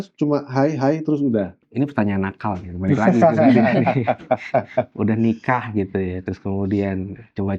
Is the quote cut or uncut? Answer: cut